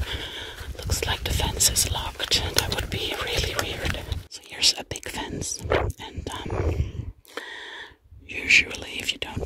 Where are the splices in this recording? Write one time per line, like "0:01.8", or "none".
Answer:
0:04.4